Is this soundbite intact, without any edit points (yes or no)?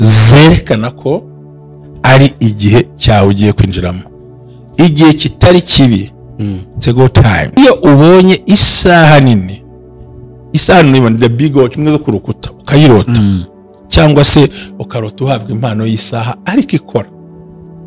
no